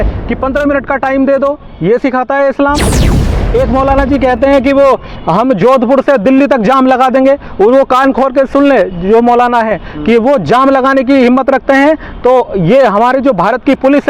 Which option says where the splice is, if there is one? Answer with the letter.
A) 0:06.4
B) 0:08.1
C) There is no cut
C